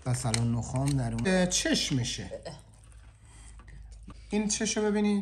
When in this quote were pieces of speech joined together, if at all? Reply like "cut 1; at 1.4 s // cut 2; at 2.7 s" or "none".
cut 1; at 1.3 s // cut 2; at 4.1 s